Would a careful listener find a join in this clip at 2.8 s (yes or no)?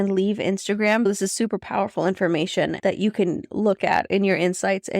yes